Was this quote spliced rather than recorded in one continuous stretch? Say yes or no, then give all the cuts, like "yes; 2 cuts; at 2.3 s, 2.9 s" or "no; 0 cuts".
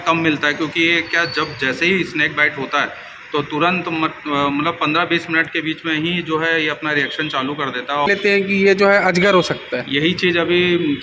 yes; 1 cut; at 8.1 s